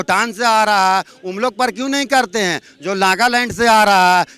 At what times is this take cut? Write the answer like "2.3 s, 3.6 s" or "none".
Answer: none

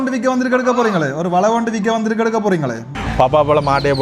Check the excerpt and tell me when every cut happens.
3.0 s

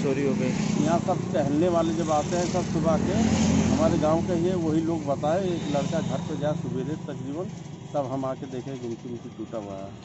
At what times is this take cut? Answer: none

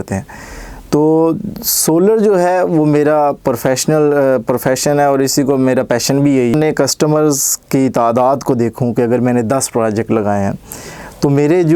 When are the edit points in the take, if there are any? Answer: 6.5 s

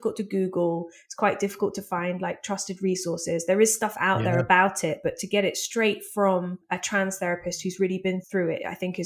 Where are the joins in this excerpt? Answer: 6.6 s, 8.2 s

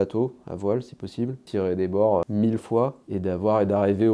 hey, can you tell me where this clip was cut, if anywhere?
1.4 s, 2.3 s, 3.0 s

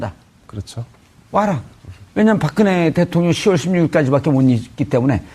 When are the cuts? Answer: 4.3 s

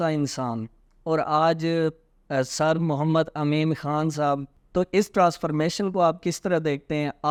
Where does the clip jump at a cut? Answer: none

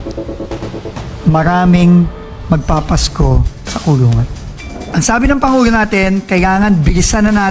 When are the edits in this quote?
4.8 s

